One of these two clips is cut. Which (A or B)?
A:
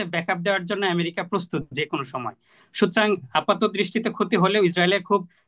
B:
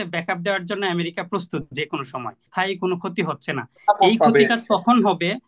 B